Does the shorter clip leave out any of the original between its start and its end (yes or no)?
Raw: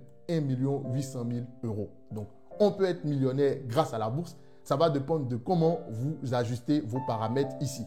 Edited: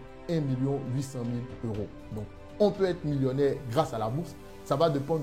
no